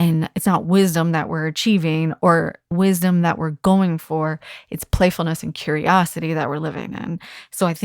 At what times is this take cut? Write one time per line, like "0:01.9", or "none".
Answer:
0:02.7